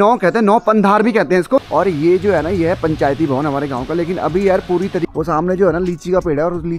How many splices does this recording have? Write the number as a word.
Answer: two